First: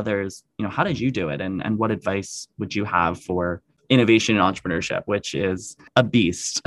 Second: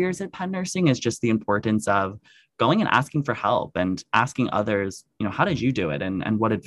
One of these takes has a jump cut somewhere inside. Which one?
first; 2 cuts; at 3.7 s, 5.9 s

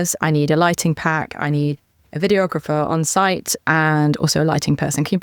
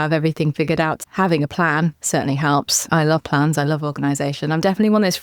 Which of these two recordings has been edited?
second; 2 cuts; at 1.0 s, 2.9 s

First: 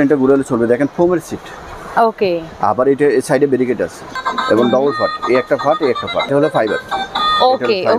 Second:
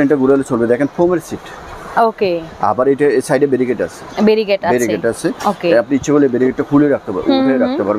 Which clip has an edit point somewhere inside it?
first; 2 cuts; at 4.1 s, 6.3 s

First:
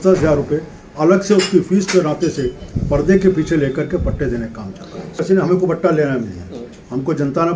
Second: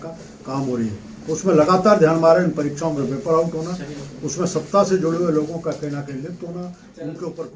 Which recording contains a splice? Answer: first; 1 cut; at 5.2 s

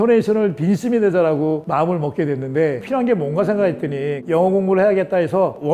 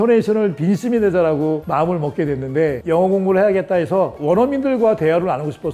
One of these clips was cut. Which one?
second; 1 cut; at 2.8 s

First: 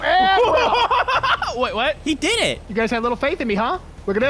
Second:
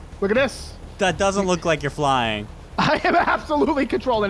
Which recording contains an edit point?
first; 1 cut; at 2.6 s

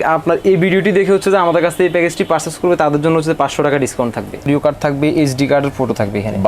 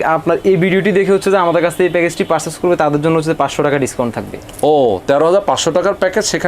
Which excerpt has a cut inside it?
first; 1 cut; at 4.5 s

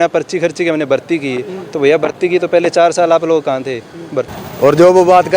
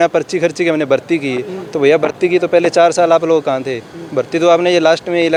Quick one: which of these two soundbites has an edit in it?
first; 1 cut; at 4.3 s

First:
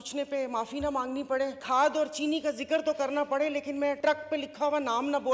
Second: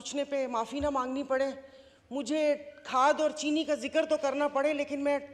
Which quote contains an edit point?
first; 2 cuts; at 1.6 s, 4.0 s

